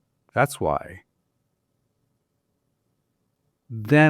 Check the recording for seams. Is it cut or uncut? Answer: uncut